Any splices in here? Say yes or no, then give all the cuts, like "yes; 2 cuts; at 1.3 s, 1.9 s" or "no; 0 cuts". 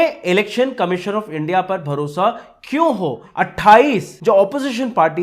yes; 2 cuts; at 3.2 s, 4.1 s